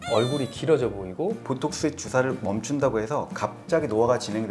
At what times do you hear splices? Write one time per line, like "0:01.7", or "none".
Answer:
0:01.4